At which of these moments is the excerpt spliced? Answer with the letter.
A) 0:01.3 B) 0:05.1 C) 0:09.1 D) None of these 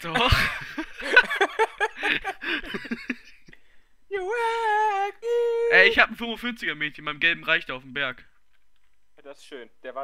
A